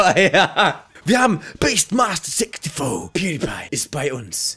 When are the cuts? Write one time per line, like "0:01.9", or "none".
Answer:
0:03.1